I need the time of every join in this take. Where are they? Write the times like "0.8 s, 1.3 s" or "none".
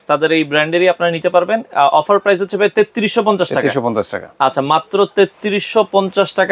none